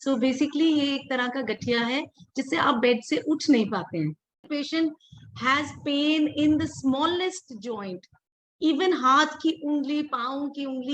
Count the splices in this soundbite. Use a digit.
1